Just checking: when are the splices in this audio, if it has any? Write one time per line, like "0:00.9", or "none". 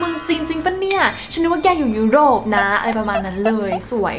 none